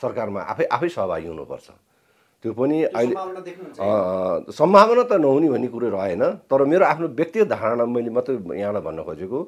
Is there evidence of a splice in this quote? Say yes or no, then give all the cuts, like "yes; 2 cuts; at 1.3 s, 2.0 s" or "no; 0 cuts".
no; 0 cuts